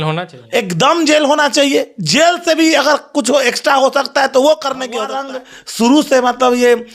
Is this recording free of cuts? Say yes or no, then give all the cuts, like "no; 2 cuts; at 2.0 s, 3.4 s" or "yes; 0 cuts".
no; 1 cut; at 5.2 s